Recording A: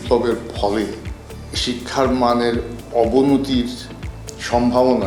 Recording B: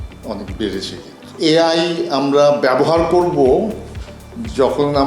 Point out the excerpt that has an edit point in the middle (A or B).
B